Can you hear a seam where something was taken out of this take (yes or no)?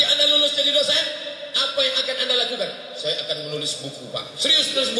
no